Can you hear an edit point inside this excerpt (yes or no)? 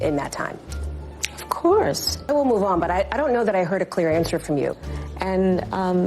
yes